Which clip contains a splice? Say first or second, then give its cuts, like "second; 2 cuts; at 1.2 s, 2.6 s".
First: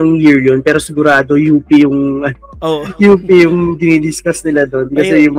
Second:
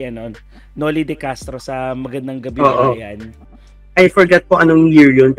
second; 1 cut; at 3.3 s